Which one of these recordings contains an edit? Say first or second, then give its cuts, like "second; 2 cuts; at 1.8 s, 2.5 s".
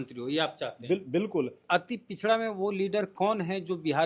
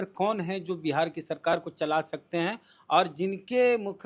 first; 1 cut; at 1.6 s